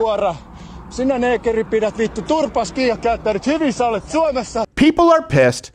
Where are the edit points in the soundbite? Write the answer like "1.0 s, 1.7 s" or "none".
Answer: 4.6 s